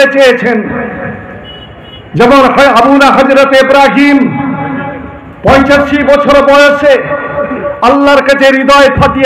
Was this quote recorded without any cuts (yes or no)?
yes